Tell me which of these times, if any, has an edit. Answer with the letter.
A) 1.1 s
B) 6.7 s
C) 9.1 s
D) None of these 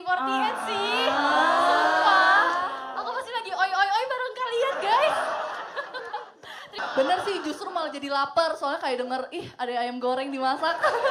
B